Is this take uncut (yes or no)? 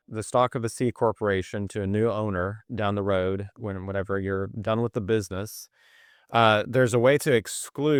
yes